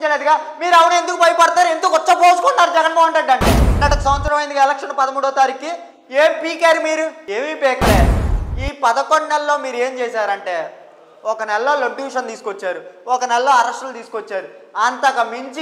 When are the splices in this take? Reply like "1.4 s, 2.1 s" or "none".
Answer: 3.7 s, 8.3 s